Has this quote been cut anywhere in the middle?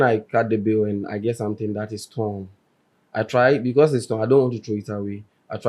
no; 0 cuts

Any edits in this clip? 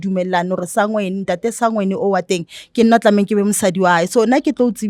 no; 0 cuts

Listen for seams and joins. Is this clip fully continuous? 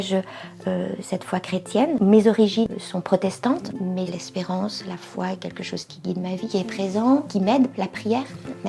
no; 2 cuts; at 2.7 s, 4.1 s

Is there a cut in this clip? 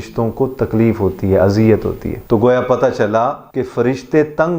yes; 2 cuts; at 2.1 s, 3.5 s

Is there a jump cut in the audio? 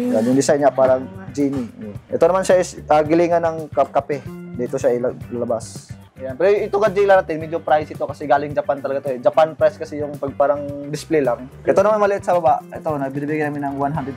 yes; 3 cuts; at 2.0 s, 6.0 s, 11.5 s

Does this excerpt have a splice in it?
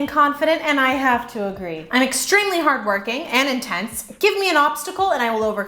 no; 0 cuts

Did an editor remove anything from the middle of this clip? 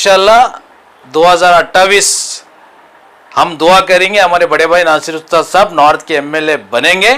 no; 0 cuts

